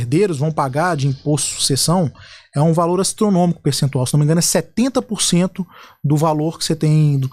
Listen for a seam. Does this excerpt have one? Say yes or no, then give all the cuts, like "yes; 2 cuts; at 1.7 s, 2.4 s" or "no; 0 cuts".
no; 0 cuts